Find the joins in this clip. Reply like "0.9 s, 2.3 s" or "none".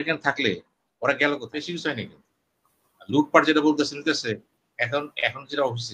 1.5 s